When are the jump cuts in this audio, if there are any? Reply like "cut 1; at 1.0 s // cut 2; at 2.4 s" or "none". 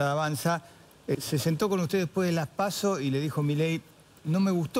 cut 1; at 1.2 s